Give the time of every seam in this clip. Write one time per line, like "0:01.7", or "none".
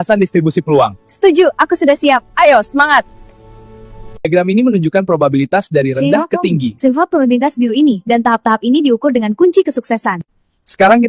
none